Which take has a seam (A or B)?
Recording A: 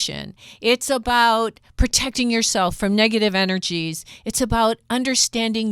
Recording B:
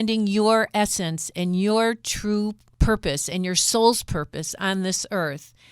B